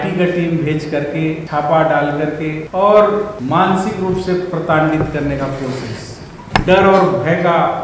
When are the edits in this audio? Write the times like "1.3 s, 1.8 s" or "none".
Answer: 1.4 s, 2.6 s, 3.4 s, 6.3 s